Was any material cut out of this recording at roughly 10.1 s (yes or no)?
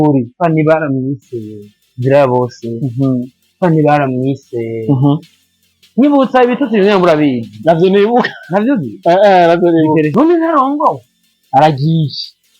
yes